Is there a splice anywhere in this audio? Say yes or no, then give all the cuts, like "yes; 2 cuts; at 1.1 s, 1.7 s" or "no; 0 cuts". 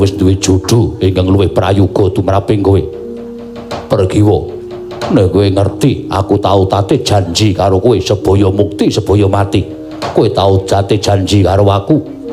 no; 0 cuts